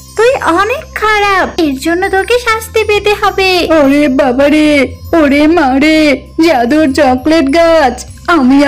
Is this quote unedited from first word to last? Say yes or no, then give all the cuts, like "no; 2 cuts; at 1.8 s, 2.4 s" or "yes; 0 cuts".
no; 2 cuts; at 1.5 s, 3.7 s